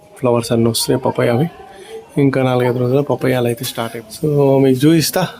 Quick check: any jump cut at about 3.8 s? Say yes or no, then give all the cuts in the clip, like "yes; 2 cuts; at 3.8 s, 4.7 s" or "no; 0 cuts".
yes; 1 cut; at 3.8 s